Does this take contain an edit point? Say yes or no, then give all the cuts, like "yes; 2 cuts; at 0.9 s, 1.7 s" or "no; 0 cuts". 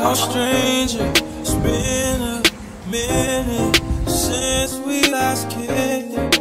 no; 0 cuts